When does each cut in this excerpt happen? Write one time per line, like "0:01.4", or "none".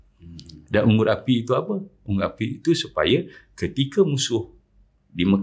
none

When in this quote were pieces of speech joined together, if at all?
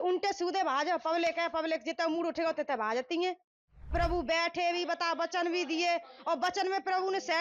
0:03.9

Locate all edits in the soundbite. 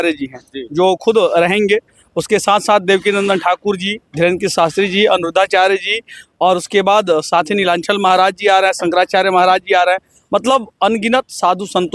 none

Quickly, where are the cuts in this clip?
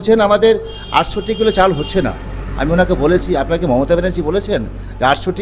none

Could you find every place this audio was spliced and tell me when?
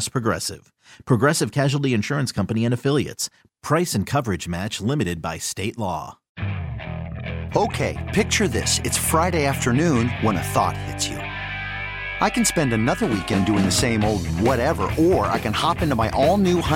0:06.3

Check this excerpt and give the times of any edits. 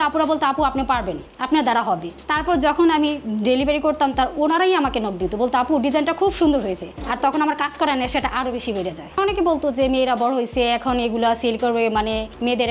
0:02.2
0:06.9
0:09.1

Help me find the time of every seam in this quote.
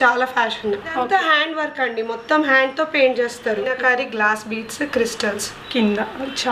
0:01.0
0:03.8

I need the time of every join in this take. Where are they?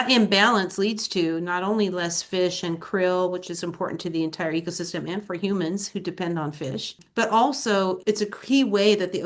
0:07.0
0:08.0

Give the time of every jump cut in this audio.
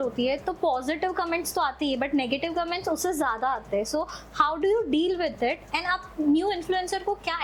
none

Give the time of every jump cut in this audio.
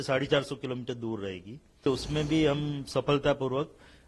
0:01.9

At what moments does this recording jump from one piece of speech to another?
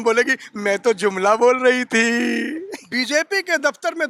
0:02.7

